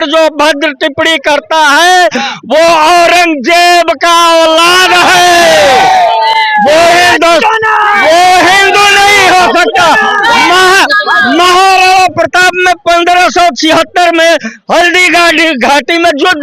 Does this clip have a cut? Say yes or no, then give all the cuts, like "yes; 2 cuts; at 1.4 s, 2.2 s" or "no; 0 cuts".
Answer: no; 0 cuts